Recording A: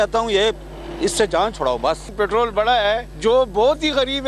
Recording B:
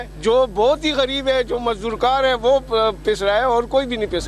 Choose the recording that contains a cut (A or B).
A